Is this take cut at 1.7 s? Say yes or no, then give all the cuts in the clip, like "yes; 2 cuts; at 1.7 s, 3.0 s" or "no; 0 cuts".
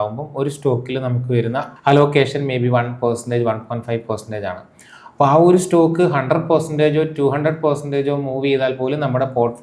yes; 1 cut; at 1.7 s